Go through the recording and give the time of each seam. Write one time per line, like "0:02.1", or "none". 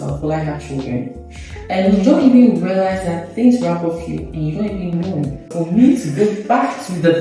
0:05.5

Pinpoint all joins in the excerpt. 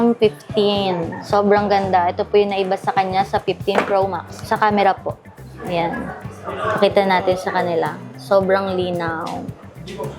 0:01.2
0:04.4

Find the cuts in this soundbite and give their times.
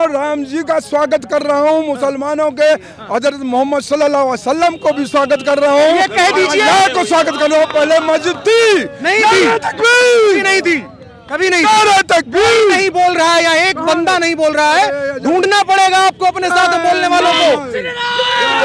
none

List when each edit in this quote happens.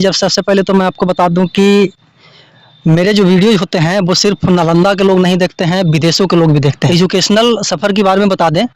0:06.8

